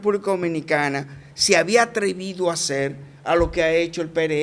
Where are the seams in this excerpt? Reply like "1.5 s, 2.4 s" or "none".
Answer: none